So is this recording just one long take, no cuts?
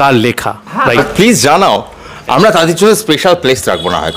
no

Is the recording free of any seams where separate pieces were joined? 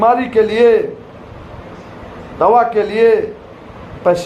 yes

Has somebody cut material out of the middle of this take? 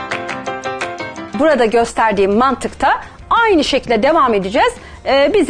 no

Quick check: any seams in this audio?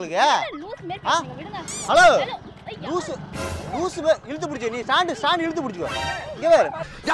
no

